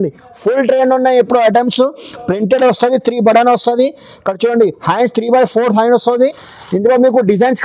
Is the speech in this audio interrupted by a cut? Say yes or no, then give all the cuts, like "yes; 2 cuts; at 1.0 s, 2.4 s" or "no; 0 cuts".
no; 0 cuts